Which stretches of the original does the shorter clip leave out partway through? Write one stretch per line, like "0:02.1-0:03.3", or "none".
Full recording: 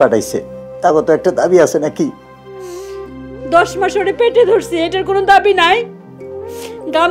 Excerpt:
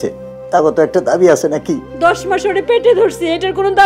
0:02.2-0:03.4